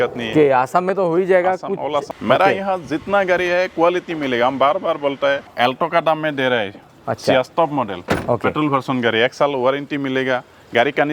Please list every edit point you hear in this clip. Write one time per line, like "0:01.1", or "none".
0:02.1
0:05.5